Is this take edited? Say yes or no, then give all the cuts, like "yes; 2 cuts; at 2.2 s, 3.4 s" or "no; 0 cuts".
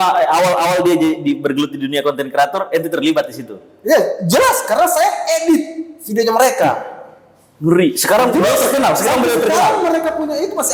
no; 0 cuts